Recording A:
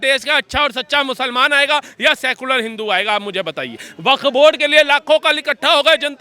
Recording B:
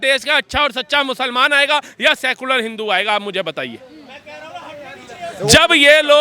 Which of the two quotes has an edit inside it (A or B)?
A